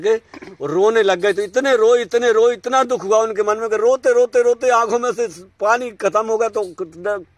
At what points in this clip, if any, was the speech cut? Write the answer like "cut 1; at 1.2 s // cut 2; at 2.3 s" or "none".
none